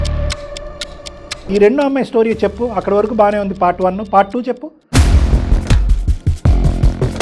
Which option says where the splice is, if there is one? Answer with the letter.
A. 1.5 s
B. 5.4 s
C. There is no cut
A